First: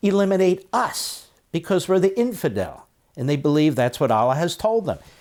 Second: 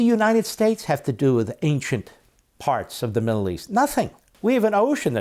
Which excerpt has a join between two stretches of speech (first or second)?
second